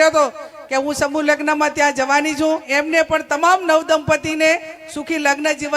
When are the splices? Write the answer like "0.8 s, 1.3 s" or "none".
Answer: 2.7 s

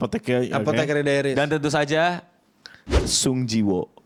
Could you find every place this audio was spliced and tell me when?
none

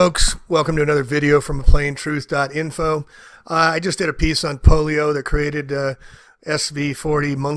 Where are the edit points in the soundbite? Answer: none

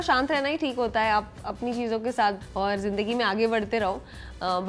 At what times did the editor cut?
2.4 s

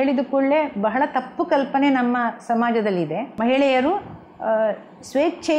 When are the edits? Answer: 3.2 s

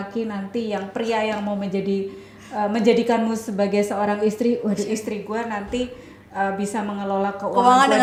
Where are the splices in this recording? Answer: none

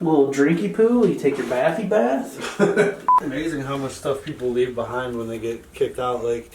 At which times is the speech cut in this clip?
3.2 s

